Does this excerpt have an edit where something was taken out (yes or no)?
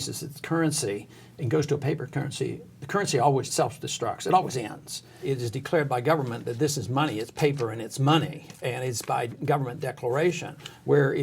yes